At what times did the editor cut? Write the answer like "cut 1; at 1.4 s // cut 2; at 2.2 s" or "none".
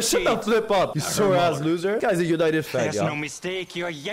cut 1; at 1.0 s // cut 2; at 2.0 s